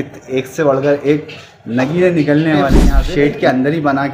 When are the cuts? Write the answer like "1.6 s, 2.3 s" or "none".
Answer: 2.8 s

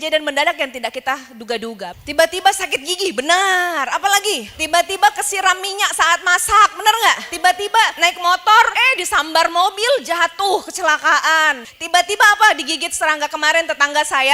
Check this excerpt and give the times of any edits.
1.9 s, 11.6 s

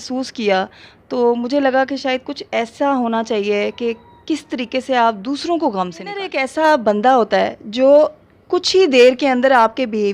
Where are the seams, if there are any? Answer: 6.4 s

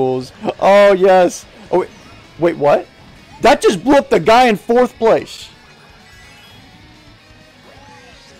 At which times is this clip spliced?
none

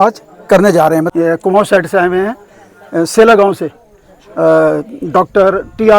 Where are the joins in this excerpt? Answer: 1.1 s

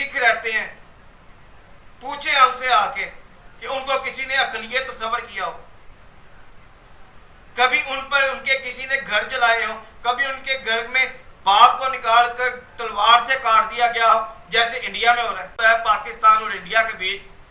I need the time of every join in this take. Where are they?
15.6 s

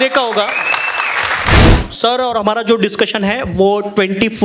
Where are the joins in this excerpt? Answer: 1.5 s

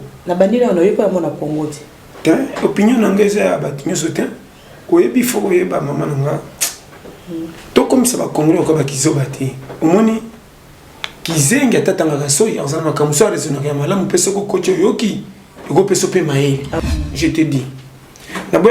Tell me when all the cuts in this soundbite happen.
16.7 s

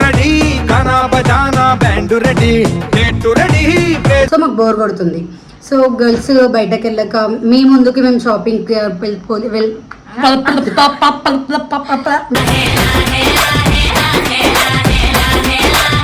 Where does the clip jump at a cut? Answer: 4.3 s

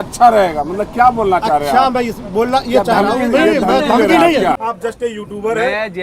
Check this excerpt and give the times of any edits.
4.7 s

